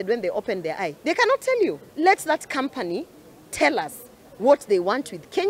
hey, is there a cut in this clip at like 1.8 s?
yes; 1 cut; at 1.8 s

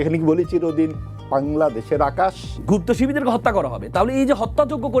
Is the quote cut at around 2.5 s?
yes; 1 cut; at 2.5 s

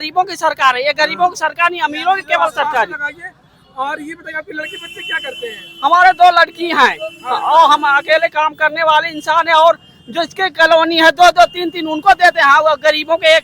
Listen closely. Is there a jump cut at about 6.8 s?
no; 0 cuts

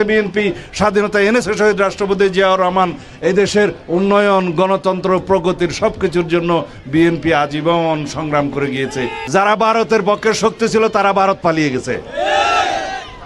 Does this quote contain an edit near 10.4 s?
no; 1 cut; at 9.2 s

